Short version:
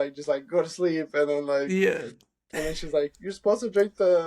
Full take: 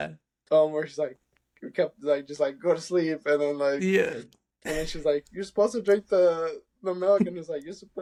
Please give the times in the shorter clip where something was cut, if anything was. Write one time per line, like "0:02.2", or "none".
none